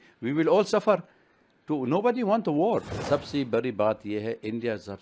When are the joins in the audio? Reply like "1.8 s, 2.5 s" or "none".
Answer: 2.9 s